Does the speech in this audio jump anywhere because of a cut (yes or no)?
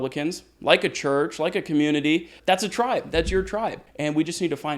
yes